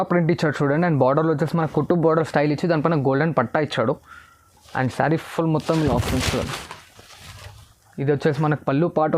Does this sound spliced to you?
no; 0 cuts

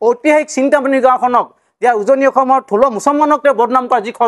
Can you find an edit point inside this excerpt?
no; 0 cuts

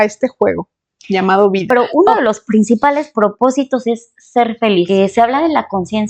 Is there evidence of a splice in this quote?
yes; 2 cuts; at 1.9 s, 4.9 s

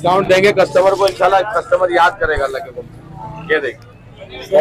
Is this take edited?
no; 0 cuts

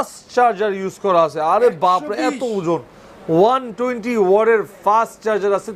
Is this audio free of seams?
yes; 0 cuts

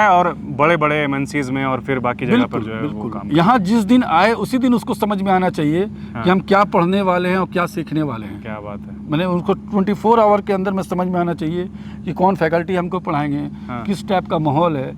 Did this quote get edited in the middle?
no; 0 cuts

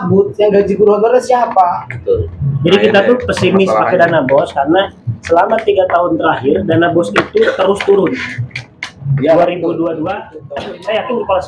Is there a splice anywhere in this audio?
yes; 1 cut; at 10.4 s

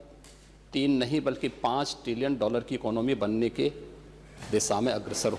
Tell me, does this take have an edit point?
no; 0 cuts

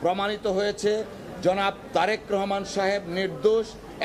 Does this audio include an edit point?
no; 0 cuts

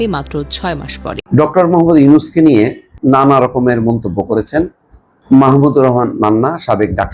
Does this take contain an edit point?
yes; 1 cut; at 1.2 s

